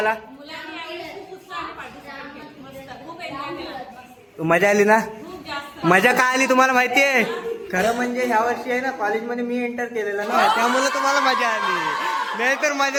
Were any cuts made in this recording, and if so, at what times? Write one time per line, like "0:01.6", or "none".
none